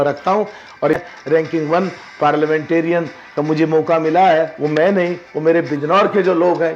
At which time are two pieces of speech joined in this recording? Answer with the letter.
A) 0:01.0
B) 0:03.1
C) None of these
A